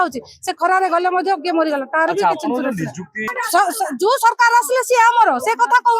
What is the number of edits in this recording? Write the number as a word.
one